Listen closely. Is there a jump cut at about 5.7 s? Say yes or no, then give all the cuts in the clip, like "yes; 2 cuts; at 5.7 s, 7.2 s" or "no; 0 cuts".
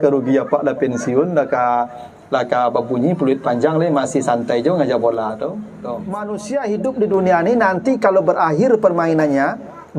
yes; 1 cut; at 5.7 s